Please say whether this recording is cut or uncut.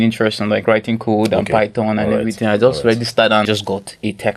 cut